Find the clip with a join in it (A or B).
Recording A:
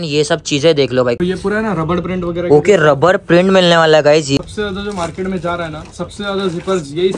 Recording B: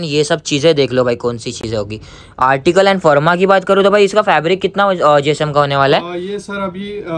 A